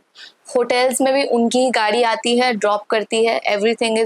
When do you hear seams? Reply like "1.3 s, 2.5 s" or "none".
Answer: none